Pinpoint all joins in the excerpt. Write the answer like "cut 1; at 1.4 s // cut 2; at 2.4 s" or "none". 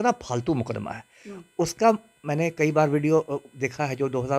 none